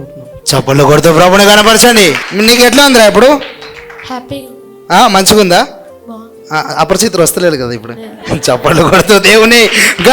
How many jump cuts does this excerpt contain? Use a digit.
1